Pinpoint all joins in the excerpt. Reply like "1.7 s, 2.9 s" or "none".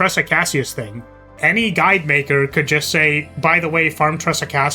1.3 s